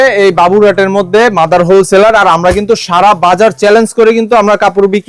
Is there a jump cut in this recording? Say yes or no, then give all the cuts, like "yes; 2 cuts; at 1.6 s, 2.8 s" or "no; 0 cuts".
no; 0 cuts